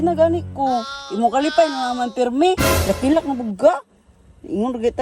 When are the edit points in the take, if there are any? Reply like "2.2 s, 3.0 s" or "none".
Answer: 1.0 s, 2.7 s